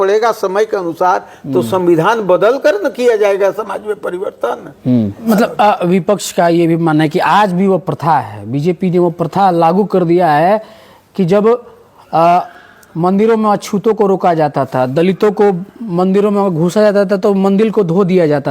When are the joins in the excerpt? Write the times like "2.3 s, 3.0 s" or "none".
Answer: 5.2 s